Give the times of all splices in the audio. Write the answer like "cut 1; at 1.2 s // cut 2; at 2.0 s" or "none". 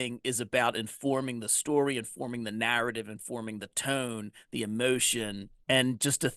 cut 1; at 5.5 s